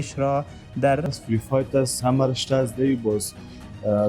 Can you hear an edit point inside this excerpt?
yes; 1 cut; at 1.1 s

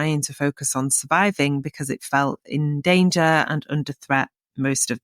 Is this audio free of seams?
yes; 0 cuts

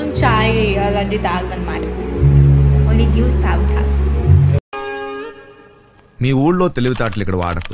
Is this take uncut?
yes; 0 cuts

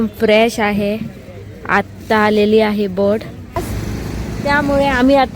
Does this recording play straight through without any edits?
no; 1 cut; at 3.8 s

